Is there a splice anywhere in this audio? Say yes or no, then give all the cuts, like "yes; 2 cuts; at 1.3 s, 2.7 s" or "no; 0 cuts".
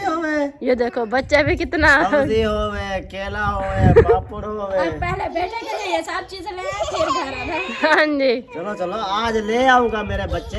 no; 0 cuts